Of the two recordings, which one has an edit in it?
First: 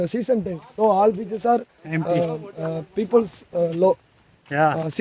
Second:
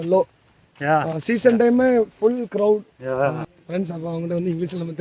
second; 1 cut; at 3.5 s

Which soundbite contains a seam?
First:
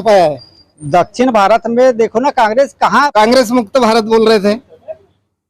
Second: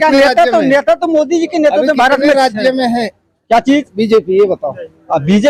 first; 1 cut; at 3.1 s

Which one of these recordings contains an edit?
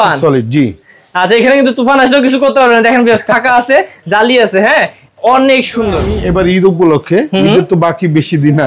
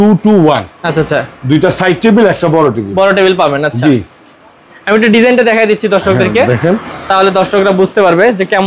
first; 1 cut; at 6.1 s

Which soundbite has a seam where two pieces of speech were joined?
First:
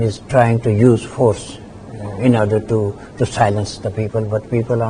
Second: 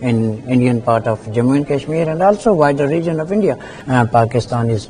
second; 1 cut; at 3.7 s

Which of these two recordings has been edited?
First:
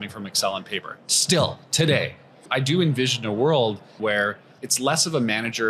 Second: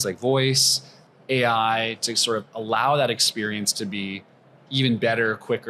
first; 2 cuts; at 2.5 s, 4.0 s

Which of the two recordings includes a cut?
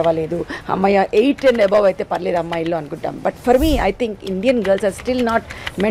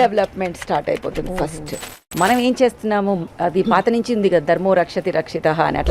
second; 1 cut; at 2.0 s

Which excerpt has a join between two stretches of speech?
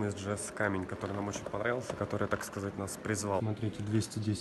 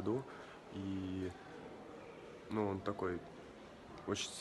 first; 1 cut; at 3.4 s

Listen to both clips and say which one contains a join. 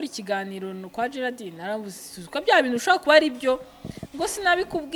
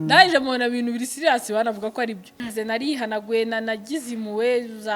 second; 1 cut; at 2.4 s

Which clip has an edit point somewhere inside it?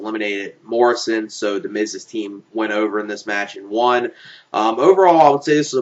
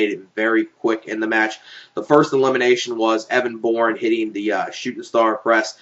second; 1 cut; at 2.4 s

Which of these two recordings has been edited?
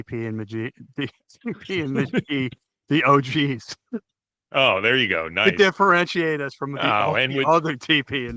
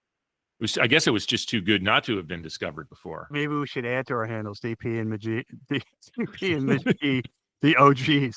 second; 1 cut; at 3.3 s

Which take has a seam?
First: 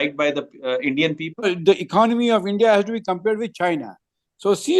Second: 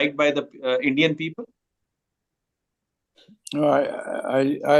first; 1 cut; at 1.4 s

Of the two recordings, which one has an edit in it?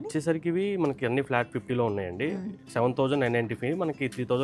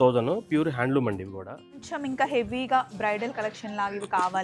second; 1 cut; at 1.9 s

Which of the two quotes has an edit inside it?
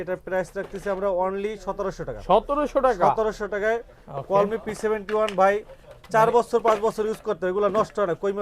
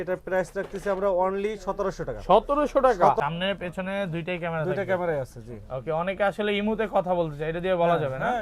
second; 1 cut; at 3.2 s

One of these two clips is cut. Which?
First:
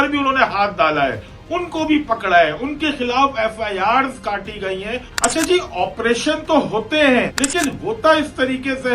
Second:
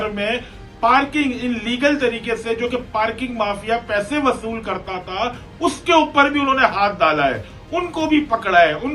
first; 2 cuts; at 5.3 s, 7.3 s

